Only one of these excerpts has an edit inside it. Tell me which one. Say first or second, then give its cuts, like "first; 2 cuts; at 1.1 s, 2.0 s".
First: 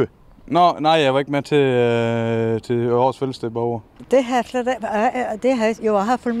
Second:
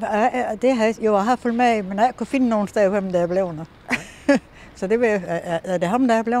first; 1 cut; at 3.9 s